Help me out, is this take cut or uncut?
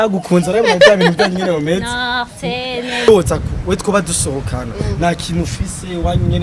cut